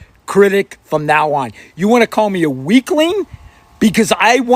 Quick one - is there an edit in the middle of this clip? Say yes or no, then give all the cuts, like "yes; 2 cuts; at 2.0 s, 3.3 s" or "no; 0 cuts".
no; 0 cuts